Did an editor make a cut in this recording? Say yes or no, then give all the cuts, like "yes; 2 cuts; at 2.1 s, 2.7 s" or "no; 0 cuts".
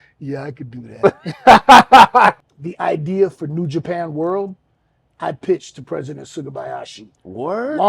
yes; 1 cut; at 2.4 s